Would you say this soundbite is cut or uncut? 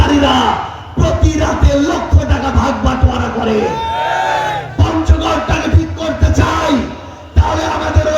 cut